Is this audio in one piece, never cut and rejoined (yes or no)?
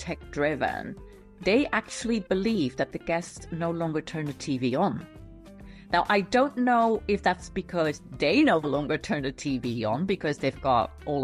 yes